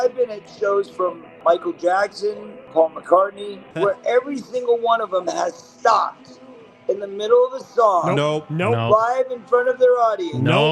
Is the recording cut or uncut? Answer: cut